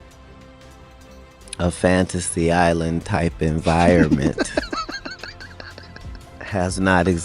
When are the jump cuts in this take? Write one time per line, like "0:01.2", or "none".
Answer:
0:01.5